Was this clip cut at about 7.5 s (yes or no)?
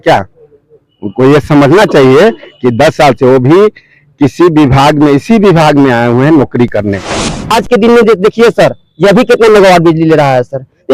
yes